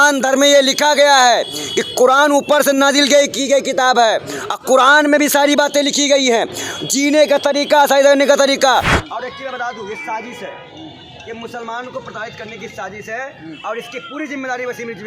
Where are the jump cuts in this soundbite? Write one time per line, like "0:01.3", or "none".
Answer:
0:09.0